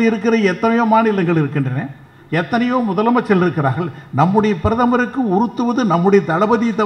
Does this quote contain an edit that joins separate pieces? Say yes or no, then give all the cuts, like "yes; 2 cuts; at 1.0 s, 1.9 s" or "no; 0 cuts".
no; 0 cuts